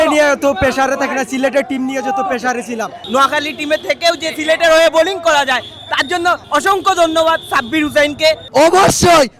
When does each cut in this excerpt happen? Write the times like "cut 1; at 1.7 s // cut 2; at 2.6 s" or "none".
cut 1; at 3.0 s // cut 2; at 6.4 s // cut 3; at 8.4 s